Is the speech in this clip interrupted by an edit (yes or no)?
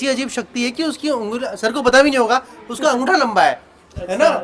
no